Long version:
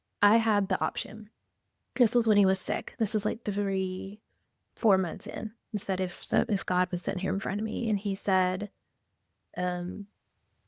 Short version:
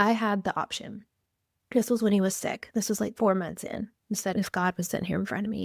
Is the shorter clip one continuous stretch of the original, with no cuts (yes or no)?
no